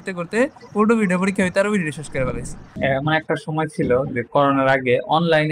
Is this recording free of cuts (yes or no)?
no